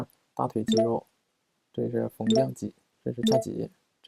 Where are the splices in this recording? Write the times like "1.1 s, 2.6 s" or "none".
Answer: none